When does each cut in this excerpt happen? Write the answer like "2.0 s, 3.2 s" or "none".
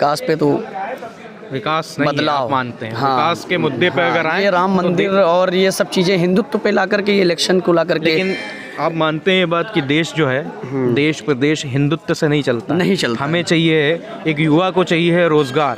none